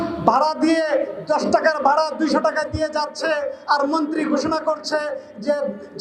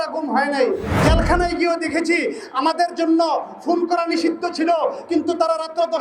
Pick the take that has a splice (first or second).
second